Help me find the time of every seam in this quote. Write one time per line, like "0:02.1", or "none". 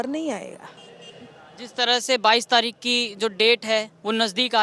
none